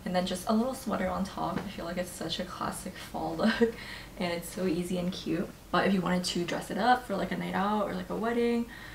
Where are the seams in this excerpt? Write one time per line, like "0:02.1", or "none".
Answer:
0:05.6